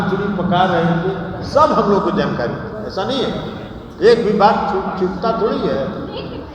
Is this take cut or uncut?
uncut